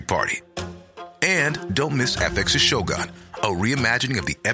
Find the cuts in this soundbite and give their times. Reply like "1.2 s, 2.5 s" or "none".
none